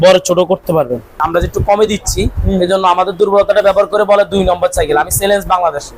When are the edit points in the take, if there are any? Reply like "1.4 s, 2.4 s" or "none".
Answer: 1.2 s